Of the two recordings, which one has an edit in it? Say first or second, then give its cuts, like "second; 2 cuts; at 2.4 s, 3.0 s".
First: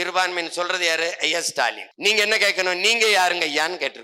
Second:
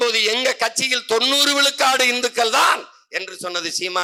first; 1 cut; at 1.9 s